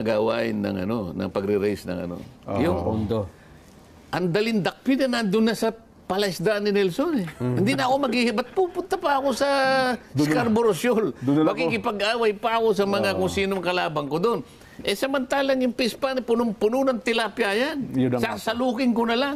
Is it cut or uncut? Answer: uncut